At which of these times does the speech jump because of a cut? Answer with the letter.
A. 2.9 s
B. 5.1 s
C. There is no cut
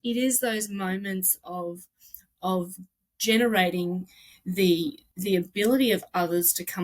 B